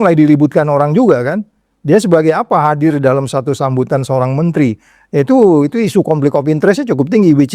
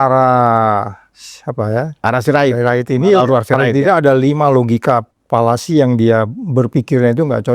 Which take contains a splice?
second; 1 cut; at 5.2 s

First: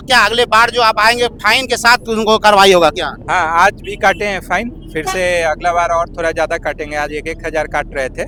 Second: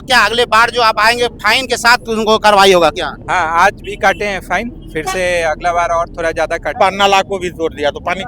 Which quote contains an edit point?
second; 1 cut; at 6.7 s

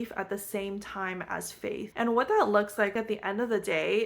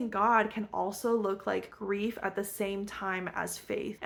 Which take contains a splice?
first; 1 cut; at 2.9 s

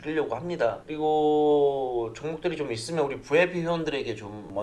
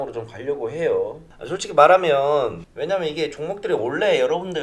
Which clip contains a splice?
second; 1 cut; at 1.3 s

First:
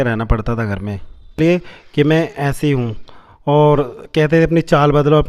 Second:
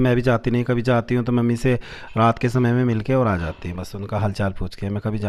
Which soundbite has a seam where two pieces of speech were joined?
first; 1 cut; at 1.4 s

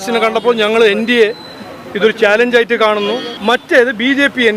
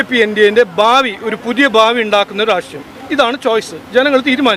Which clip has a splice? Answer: first; 1 cut; at 3.3 s

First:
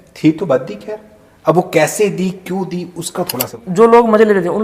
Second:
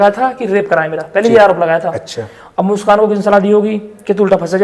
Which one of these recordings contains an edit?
first; 1 cut; at 3.6 s

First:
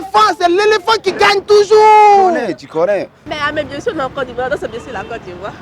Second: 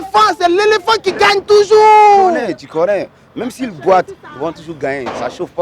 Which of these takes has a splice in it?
first; 1 cut; at 3.2 s

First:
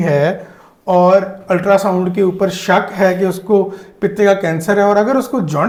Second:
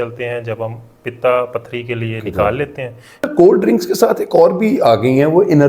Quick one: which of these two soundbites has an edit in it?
second; 1 cut; at 3.3 s

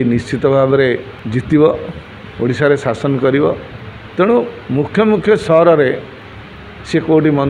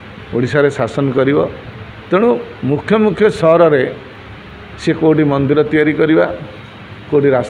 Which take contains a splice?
first; 1 cut; at 1.1 s

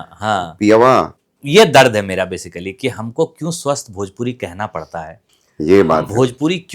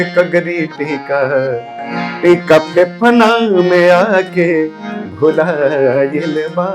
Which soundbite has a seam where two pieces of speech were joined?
first; 1 cut; at 1.2 s

